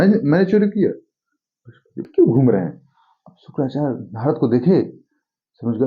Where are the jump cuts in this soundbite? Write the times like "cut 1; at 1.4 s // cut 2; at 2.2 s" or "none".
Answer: cut 1; at 2.0 s